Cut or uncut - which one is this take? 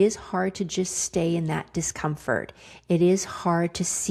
uncut